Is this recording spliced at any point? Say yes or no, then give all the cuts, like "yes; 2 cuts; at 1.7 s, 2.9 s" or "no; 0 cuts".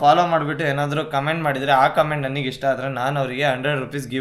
no; 0 cuts